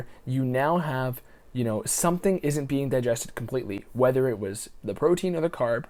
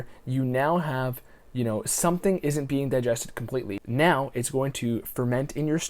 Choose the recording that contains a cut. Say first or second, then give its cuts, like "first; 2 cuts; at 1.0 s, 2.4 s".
second; 1 cut; at 3.8 s